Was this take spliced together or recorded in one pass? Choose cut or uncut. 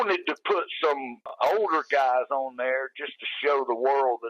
cut